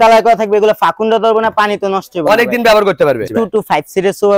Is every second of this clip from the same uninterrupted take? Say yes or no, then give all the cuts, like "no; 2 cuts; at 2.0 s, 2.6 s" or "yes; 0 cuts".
no; 1 cut; at 3.3 s